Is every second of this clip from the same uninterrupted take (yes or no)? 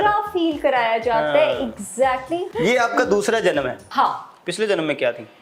no